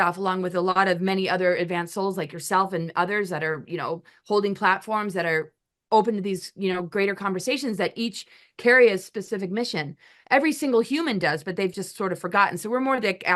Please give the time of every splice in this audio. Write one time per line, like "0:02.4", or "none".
none